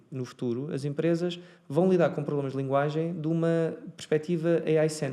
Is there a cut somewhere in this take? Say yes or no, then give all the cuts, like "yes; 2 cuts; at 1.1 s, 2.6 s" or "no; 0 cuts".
no; 0 cuts